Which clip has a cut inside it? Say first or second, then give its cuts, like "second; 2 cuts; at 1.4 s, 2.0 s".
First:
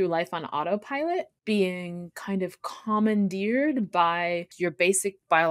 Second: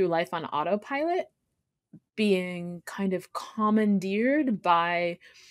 first; 2 cuts; at 1.3 s, 4.5 s